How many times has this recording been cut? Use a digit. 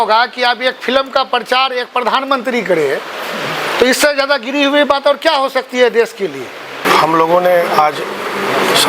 1